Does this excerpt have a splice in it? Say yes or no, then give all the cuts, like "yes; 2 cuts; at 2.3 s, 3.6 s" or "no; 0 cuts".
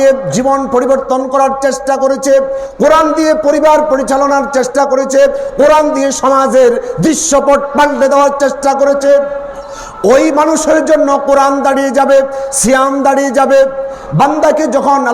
no; 0 cuts